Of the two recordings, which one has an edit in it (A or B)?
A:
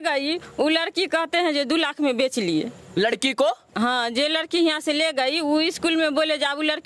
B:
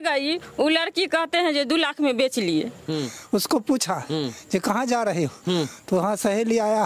B